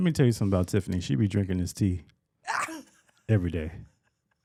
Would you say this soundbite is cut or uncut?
uncut